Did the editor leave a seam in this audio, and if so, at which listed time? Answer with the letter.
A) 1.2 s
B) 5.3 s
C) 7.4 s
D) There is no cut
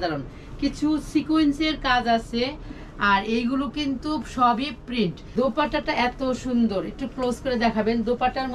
B